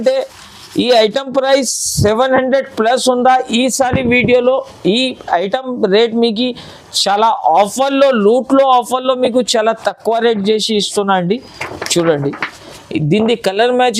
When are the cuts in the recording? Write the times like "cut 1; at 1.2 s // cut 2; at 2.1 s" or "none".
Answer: none